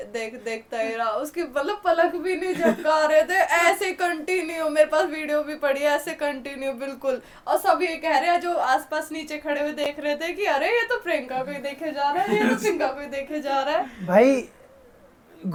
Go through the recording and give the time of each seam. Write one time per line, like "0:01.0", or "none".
none